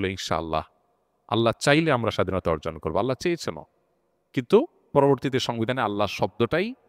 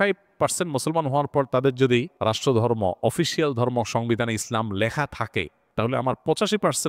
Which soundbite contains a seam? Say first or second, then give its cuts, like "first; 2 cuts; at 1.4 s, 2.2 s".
second; 2 cuts; at 2.1 s, 5.6 s